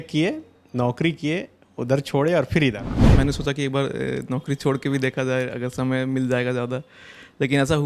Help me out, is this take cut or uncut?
cut